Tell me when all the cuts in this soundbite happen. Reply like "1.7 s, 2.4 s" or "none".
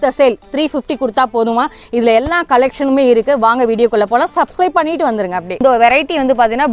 5.6 s